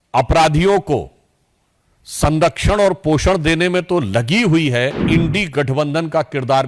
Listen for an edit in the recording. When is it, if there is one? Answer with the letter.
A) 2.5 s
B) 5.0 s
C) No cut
B